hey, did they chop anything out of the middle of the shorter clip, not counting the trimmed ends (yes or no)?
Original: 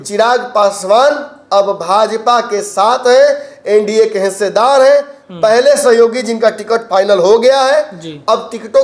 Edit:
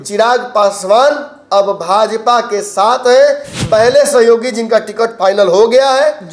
yes